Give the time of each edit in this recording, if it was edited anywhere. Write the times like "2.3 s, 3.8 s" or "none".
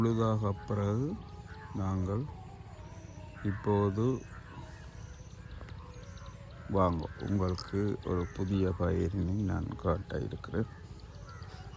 none